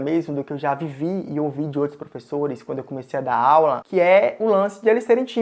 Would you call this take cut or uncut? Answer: uncut